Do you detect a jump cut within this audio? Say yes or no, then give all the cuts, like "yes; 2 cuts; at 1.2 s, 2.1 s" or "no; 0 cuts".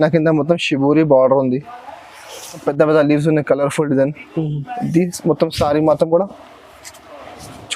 yes; 1 cut; at 2.6 s